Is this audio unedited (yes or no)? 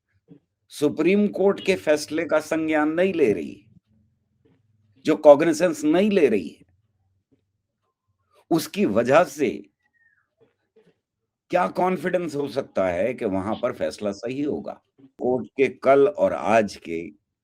no